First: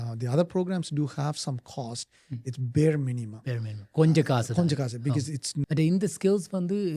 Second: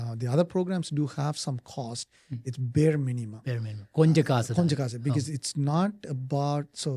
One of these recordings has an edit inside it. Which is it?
first; 1 cut; at 5.5 s

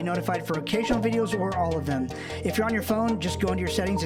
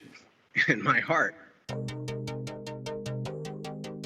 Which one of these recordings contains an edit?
second; 1 cut; at 1.6 s

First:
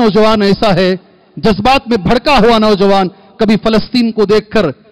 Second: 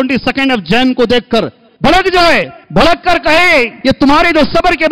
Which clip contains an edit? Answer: second; 3 cuts; at 1.6 s, 2.6 s, 3.7 s

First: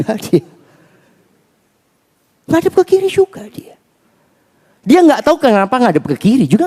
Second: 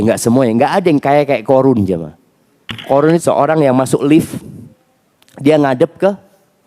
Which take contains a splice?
second; 1 cut; at 3.2 s

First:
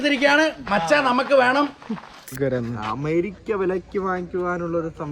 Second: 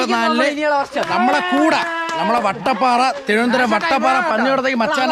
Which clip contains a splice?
first; 1 cut; at 2.4 s

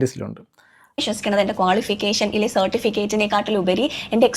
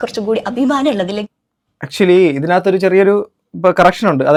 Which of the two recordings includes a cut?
first; 1 cut; at 1.1 s

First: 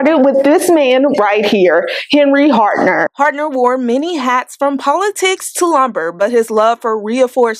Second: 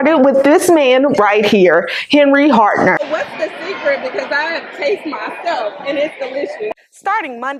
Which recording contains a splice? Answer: second; 2 cuts; at 3.0 s, 6.7 s

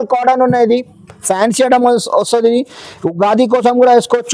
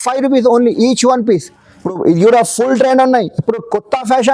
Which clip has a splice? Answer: second; 1 cut; at 1.9 s

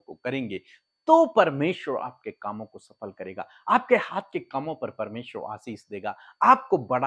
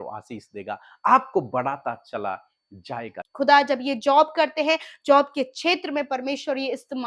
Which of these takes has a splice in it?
second; 1 cut; at 3.2 s

